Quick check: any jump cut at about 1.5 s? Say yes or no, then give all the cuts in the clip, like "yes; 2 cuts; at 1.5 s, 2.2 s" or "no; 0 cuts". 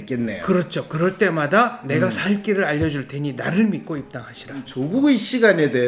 no; 1 cut; at 4.8 s